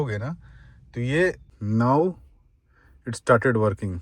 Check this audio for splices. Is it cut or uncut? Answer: cut